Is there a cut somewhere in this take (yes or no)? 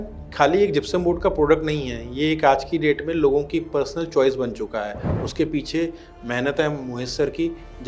no